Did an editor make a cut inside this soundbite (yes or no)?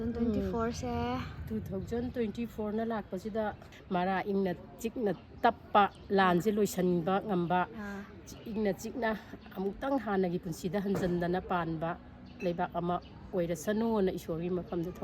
yes